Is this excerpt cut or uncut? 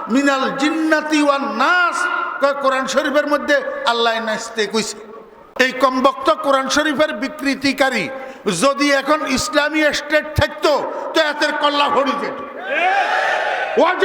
cut